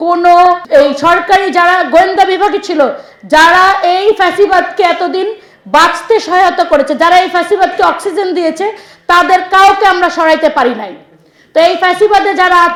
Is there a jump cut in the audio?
no; 0 cuts

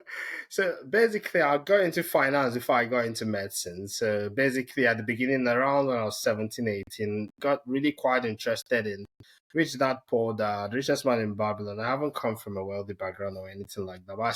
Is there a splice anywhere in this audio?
no; 0 cuts

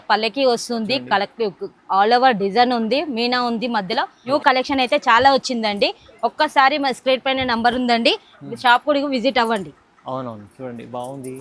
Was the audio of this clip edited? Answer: yes; 1 cut; at 4.2 s

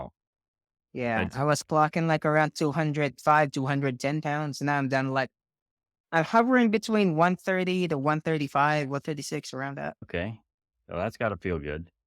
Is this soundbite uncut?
no; 1 cut; at 10.0 s

